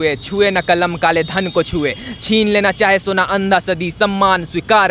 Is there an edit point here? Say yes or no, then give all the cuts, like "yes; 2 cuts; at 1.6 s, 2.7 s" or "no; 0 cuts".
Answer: no; 0 cuts